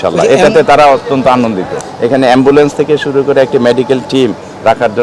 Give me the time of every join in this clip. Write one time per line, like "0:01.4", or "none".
0:01.8